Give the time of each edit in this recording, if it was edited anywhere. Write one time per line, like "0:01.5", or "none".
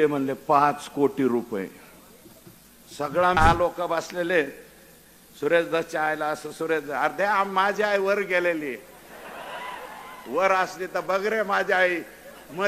0:03.4